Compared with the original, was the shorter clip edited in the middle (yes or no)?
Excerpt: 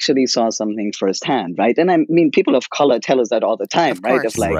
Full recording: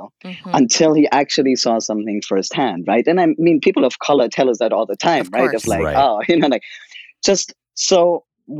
no